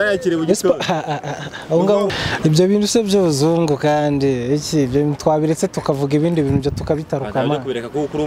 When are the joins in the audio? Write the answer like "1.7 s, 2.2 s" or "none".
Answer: 2.1 s